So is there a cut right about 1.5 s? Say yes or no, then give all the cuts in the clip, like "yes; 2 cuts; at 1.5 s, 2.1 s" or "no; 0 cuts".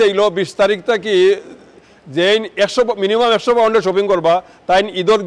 no; 0 cuts